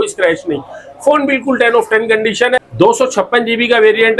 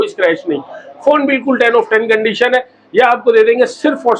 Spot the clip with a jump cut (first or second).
first